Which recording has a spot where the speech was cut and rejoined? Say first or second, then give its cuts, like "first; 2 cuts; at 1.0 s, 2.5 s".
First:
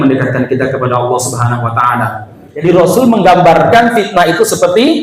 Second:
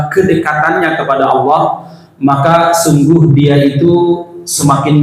first; 1 cut; at 2.4 s